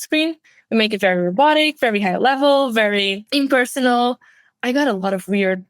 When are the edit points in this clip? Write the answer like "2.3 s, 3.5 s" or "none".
3.2 s